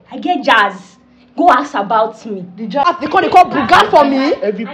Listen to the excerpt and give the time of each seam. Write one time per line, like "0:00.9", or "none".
0:02.9